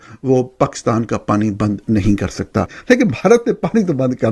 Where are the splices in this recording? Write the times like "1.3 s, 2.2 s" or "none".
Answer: 2.7 s